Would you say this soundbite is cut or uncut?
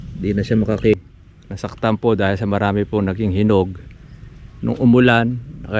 cut